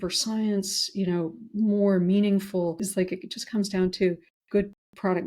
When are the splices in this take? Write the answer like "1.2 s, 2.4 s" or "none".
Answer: 2.8 s, 4.3 s